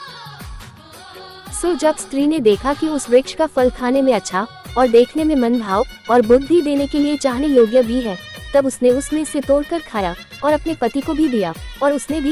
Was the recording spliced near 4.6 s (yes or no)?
no